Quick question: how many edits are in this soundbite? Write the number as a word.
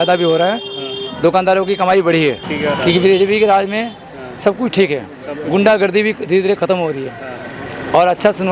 one